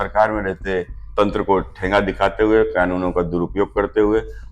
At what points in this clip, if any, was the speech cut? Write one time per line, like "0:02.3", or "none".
0:01.0

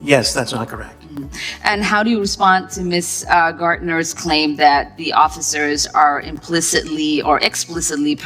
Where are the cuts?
none

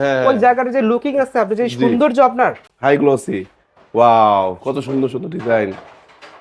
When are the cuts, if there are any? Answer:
0:02.6

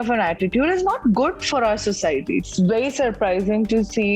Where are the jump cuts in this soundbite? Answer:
0:02.5

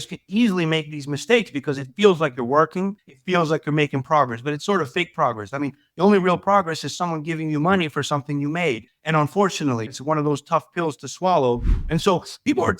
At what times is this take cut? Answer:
0:03.1
0:11.8

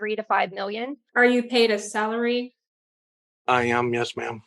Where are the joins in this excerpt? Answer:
0:01.0

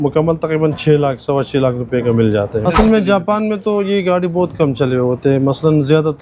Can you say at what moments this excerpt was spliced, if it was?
0:02.6

